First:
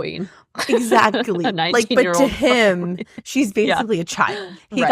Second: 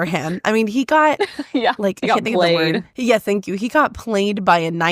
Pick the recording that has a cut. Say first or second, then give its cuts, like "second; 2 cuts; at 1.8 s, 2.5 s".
second; 1 cut; at 2.9 s